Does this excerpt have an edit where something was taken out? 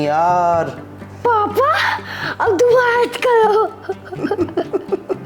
no; 0 cuts

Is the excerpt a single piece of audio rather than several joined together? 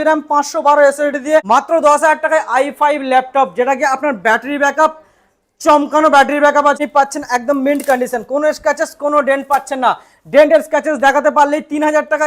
no; 2 cuts; at 1.4 s, 6.8 s

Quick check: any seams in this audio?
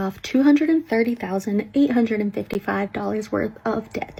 no; 0 cuts

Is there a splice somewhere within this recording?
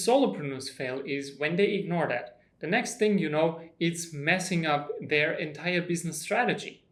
no; 0 cuts

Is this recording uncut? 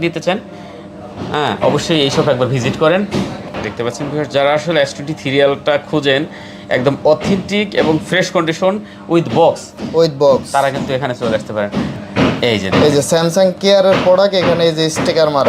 no; 2 cuts; at 3.5 s, 12.0 s

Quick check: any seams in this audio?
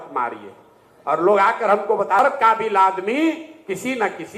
yes; 1 cut; at 2.2 s

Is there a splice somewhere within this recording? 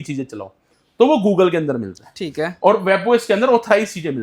no; 0 cuts

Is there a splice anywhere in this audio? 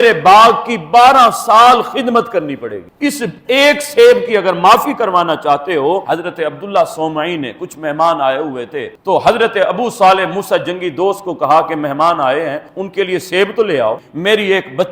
yes; 2 cuts; at 6.1 s, 14.0 s

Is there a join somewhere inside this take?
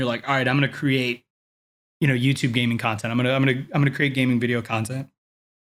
no; 0 cuts

